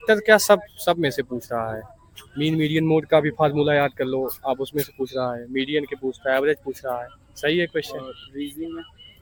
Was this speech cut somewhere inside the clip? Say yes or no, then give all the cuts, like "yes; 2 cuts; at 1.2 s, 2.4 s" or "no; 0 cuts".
no; 0 cuts